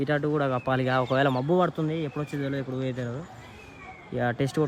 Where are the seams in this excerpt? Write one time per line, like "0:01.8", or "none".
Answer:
none